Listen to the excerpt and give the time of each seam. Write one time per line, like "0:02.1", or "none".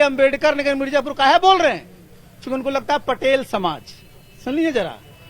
none